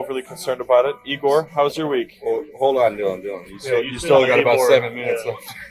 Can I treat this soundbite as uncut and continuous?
yes; 0 cuts

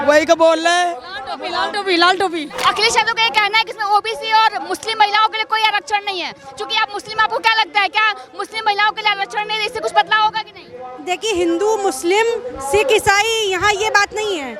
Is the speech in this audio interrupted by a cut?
yes; 1 cut; at 2.6 s

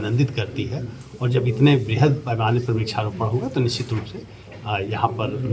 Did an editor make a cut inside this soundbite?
no; 0 cuts

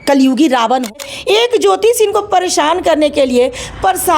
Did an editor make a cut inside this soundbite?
yes; 1 cut; at 1.1 s

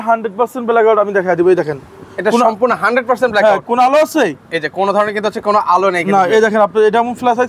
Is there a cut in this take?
no; 0 cuts

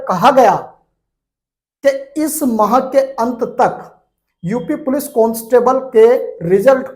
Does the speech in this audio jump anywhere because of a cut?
no; 0 cuts

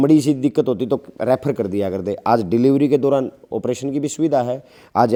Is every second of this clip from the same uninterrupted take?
yes; 0 cuts

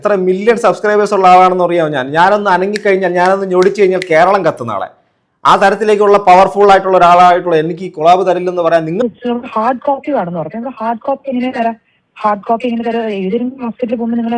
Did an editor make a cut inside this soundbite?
yes; 1 cut; at 9.0 s

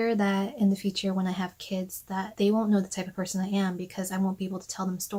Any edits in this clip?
no; 0 cuts

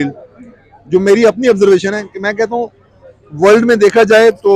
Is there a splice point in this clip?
no; 0 cuts

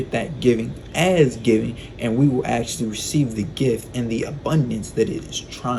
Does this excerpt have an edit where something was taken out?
no; 0 cuts

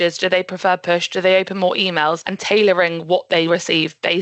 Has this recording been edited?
no; 0 cuts

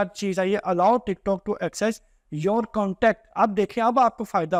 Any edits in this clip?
no; 0 cuts

